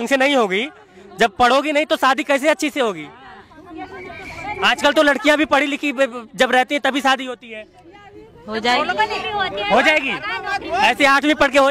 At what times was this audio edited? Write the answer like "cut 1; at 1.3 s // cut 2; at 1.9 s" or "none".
none